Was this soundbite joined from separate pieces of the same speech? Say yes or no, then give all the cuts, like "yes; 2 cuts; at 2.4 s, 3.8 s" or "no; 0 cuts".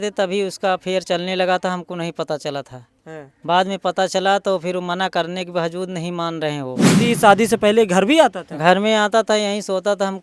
yes; 1 cut; at 6.9 s